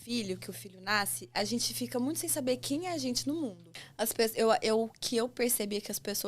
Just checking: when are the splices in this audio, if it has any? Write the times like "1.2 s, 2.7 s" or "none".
3.6 s

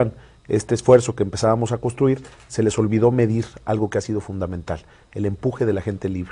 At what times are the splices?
0.9 s

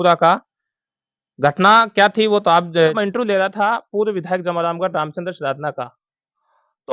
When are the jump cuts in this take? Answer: 2.9 s

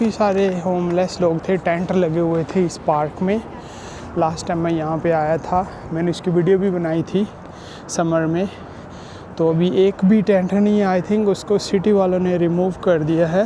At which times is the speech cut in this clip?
none

